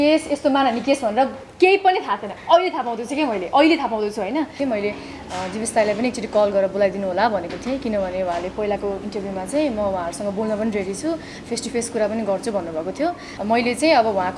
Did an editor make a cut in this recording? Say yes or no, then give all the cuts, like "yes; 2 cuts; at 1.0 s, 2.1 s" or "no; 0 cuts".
yes; 2 cuts; at 4.5 s, 13.3 s